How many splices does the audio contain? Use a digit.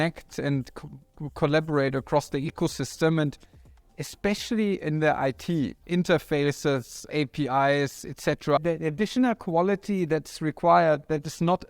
3